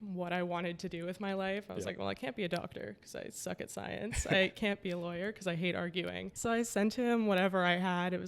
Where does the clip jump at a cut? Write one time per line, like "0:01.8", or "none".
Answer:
0:06.3